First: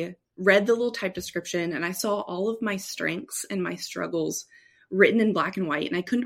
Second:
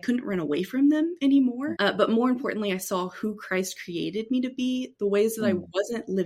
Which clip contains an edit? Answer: second; 1 cut; at 1.7 s

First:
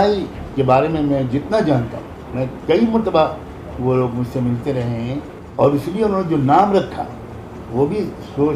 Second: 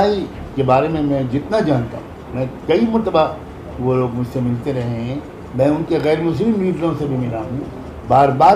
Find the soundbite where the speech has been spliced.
first; 1 cut; at 5.4 s

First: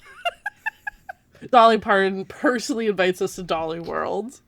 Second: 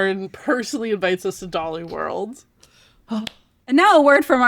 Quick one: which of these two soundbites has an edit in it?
second; 1 cut; at 3.5 s

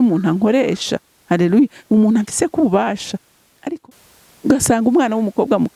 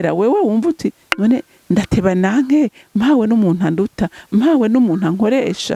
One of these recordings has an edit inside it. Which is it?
first; 1 cut; at 3.5 s

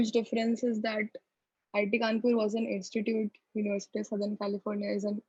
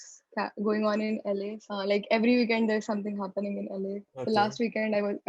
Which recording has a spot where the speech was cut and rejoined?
second; 2 cuts; at 1.6 s, 4.1 s

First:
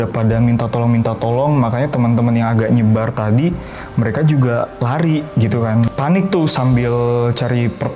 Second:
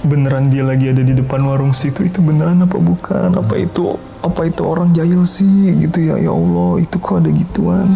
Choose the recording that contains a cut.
first; 1 cut; at 5.9 s

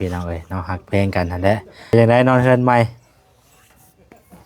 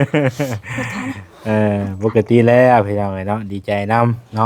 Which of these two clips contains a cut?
first; 1 cut; at 1.9 s

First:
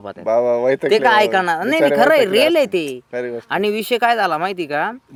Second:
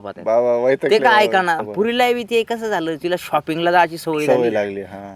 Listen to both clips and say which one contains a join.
second; 1 cut; at 1.6 s

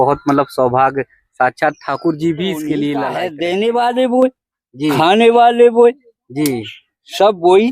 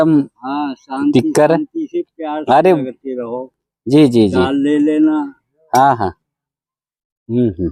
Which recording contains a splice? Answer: first; 1 cut; at 3.2 s

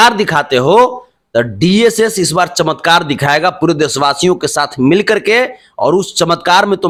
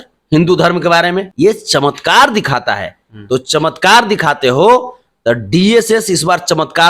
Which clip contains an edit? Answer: second; 1 cut; at 1.3 s

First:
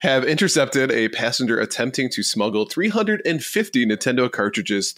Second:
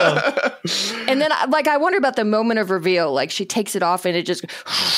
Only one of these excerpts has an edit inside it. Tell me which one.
second; 1 cut; at 0.9 s

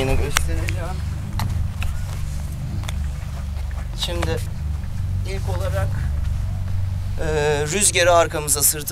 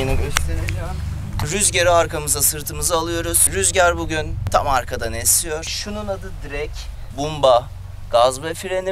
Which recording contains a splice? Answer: second; 4 cuts; at 1.5 s, 4.4 s, 5.7 s, 7.0 s

